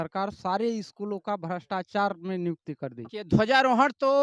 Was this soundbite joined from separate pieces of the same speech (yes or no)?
yes